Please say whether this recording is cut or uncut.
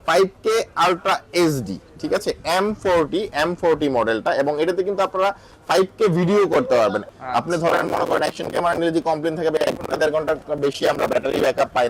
cut